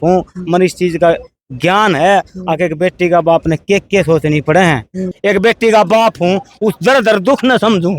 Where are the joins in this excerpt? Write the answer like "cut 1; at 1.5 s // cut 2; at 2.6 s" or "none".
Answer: cut 1; at 5.1 s